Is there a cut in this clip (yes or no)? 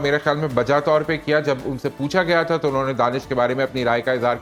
no